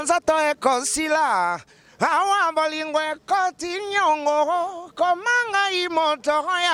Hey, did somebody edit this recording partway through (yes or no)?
no